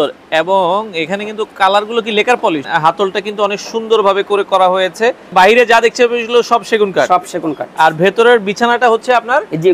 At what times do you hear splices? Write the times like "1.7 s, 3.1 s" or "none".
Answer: 2.7 s, 5.3 s